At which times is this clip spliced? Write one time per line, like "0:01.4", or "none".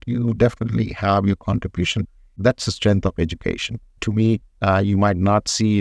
0:02.1
0:04.5